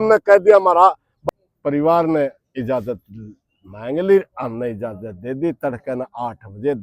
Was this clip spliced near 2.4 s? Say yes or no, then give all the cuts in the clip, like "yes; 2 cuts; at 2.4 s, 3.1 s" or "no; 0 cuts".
no; 1 cut; at 1.1 s